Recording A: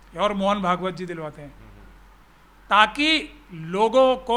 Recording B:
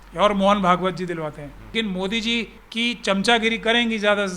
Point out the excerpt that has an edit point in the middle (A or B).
B